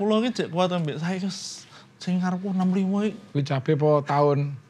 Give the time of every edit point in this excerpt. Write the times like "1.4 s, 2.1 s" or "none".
3.3 s